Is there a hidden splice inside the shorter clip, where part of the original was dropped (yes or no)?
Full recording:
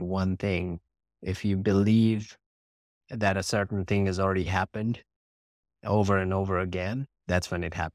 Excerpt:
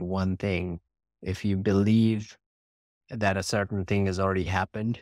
no